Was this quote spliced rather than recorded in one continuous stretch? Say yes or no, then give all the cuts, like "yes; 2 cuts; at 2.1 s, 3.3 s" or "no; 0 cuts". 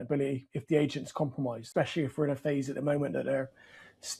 yes; 1 cut; at 1.6 s